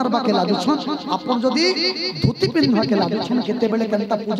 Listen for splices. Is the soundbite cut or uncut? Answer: uncut